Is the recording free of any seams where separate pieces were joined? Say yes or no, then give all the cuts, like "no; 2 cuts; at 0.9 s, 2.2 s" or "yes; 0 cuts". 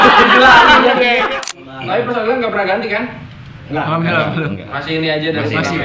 no; 1 cut; at 1.3 s